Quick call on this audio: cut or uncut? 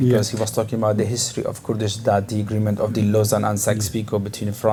uncut